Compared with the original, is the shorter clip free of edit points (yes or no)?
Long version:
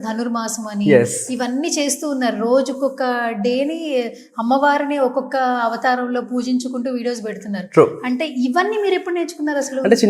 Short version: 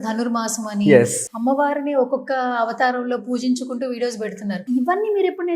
no